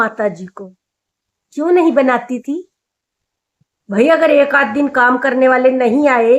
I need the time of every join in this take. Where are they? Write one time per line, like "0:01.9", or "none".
none